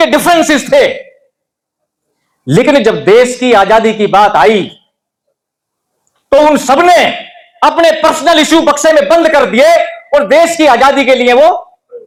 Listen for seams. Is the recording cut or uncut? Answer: uncut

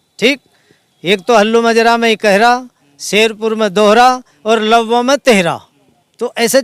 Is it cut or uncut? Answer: uncut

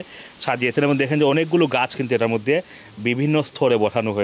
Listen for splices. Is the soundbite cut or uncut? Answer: uncut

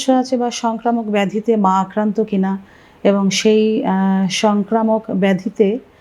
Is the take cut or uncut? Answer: uncut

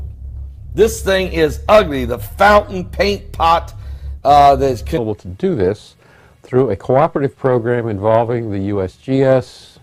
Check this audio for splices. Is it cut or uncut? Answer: uncut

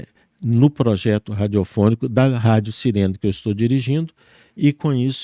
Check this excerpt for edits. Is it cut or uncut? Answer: uncut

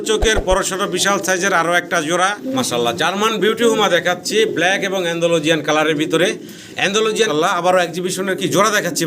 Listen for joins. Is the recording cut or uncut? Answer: cut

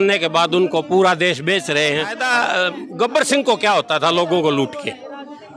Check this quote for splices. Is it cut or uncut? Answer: cut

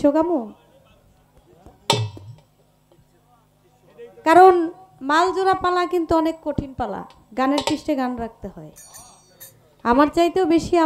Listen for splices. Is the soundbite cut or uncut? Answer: uncut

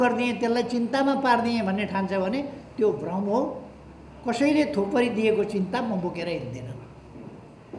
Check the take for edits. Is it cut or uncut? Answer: uncut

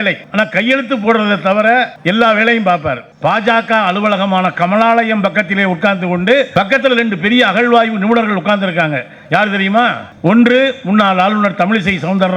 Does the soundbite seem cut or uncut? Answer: cut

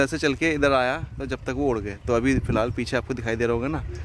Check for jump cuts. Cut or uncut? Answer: uncut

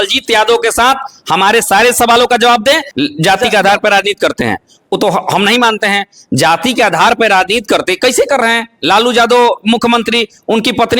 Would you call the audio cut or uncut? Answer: cut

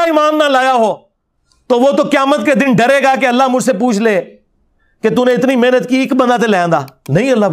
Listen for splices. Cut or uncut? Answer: uncut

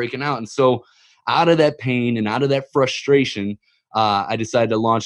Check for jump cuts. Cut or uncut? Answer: uncut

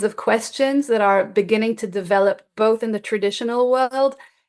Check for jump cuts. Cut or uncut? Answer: uncut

